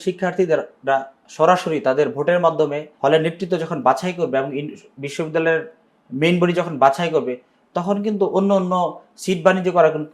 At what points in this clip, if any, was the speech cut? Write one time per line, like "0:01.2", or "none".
0:02.9